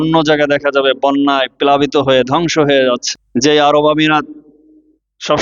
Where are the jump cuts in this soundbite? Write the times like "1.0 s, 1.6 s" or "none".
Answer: 3.1 s